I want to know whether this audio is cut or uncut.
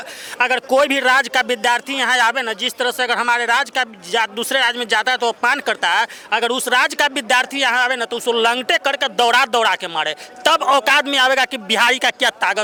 uncut